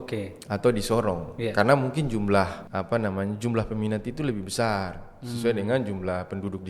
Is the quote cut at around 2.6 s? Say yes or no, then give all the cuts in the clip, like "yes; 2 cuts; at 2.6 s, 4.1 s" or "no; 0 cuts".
yes; 1 cut; at 2.6 s